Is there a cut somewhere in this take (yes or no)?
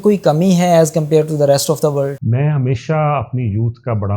yes